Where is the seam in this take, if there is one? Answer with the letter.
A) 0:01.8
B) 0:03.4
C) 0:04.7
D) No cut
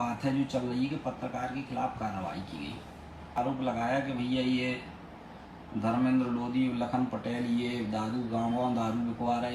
B